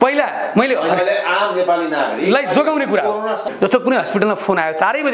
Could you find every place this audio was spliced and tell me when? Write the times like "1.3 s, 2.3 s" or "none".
3.5 s